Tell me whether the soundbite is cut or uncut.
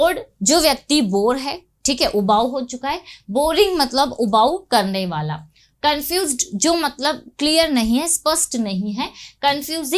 uncut